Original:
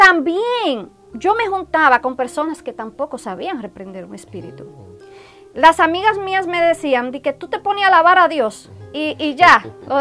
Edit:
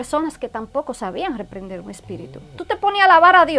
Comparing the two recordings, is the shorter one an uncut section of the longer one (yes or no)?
no